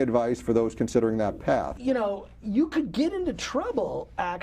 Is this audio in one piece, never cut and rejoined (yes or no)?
no